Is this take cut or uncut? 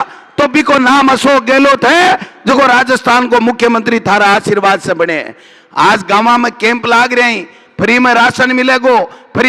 uncut